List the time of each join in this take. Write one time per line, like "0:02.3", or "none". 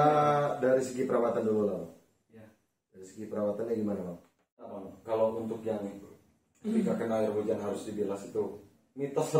0:04.9